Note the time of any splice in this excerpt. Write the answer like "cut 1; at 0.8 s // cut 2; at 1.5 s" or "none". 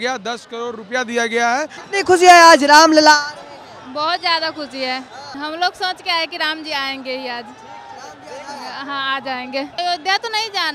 cut 1; at 1.8 s // cut 2; at 5.3 s // cut 3; at 9.8 s